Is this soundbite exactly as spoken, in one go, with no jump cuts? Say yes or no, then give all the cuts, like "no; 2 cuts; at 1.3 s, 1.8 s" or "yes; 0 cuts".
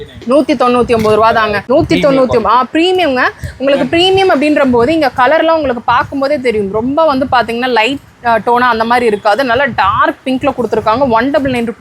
no; 1 cut; at 1.6 s